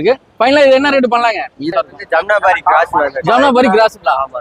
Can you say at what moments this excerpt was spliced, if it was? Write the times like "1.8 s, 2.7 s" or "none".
1.6 s